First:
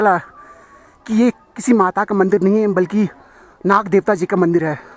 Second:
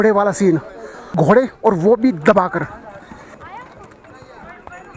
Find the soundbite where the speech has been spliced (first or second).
second